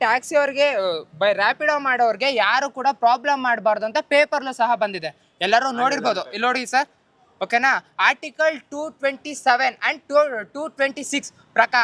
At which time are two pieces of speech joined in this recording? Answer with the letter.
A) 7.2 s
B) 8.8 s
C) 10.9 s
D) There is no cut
D